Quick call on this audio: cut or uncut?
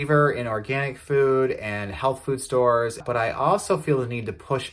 cut